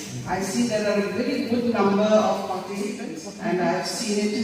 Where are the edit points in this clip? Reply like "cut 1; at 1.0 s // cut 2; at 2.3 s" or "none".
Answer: cut 1; at 2.9 s